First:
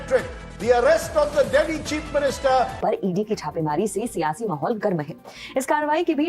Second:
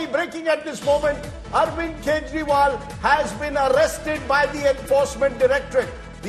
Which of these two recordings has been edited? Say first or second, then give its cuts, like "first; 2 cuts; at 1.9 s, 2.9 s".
first; 1 cut; at 3.1 s